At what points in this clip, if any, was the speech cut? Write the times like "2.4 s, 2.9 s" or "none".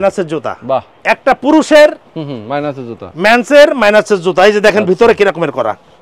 0.9 s